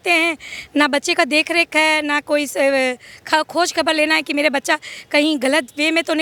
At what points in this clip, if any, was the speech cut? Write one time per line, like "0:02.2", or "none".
none